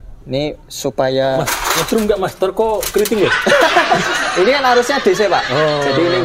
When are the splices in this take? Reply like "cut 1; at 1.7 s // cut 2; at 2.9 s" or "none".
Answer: none